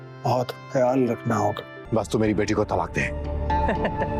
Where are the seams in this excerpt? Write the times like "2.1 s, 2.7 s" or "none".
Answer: 1.7 s